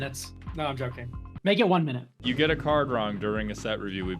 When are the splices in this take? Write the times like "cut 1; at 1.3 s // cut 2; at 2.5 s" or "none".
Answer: cut 1; at 2.2 s